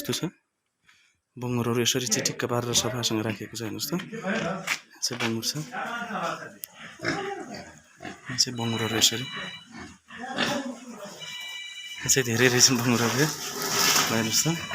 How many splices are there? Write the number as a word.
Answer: one